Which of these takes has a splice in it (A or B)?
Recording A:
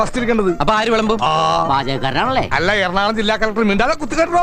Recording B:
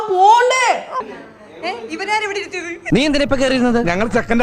B